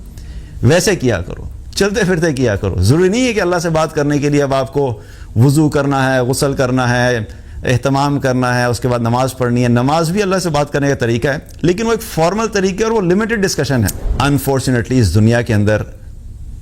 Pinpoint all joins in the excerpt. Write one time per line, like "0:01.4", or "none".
0:14.0